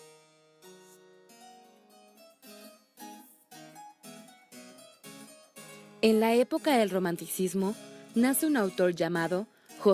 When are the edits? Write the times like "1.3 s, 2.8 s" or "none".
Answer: 4.8 s